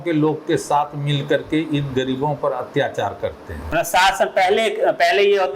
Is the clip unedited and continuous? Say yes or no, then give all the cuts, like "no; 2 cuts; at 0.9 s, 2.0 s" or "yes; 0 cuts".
yes; 0 cuts